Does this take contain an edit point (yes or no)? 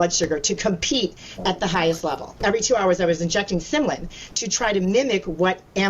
yes